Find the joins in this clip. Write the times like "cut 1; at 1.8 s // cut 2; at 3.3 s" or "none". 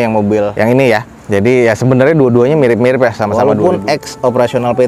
cut 1; at 3.3 s

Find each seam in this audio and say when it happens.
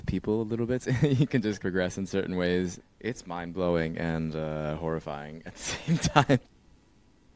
cut 1; at 1.6 s // cut 2; at 2.8 s // cut 3; at 6.5 s

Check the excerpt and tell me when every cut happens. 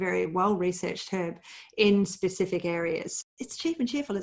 cut 1; at 3.2 s

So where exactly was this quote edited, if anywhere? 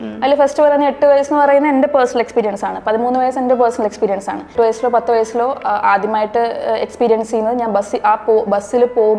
cut 1; at 4.5 s

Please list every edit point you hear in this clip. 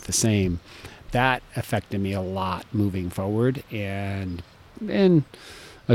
none

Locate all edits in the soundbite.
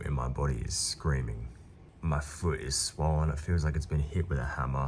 none

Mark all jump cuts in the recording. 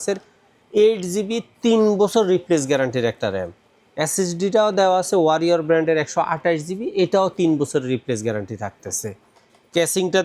none

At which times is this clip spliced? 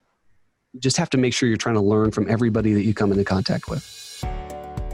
cut 1; at 4.0 s

